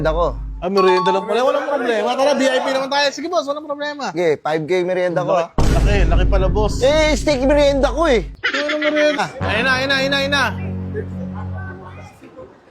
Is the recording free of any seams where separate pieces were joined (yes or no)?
no